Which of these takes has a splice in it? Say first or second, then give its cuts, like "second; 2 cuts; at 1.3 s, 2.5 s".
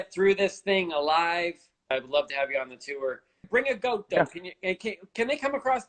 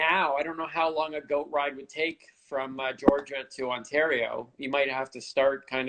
first; 2 cuts; at 1.9 s, 3.4 s